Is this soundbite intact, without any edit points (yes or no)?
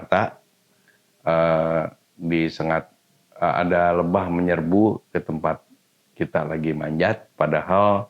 yes